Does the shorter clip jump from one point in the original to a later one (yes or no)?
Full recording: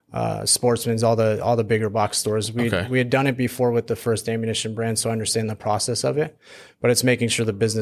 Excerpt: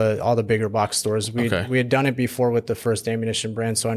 no